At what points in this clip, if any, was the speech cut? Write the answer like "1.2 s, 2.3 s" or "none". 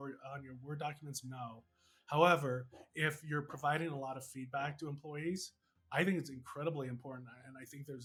none

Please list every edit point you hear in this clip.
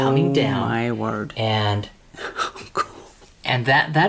none

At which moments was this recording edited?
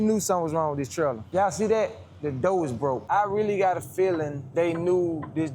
1.2 s, 3.0 s, 4.4 s

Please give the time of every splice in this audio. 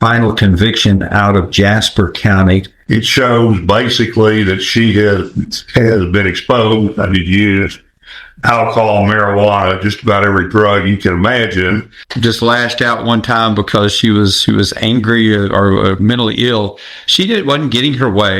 2.7 s, 11.9 s

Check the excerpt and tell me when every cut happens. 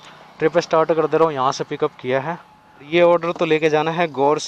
2.9 s

